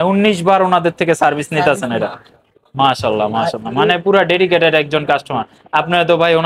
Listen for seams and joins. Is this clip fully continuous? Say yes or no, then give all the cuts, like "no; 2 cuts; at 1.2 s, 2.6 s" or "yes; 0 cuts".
yes; 0 cuts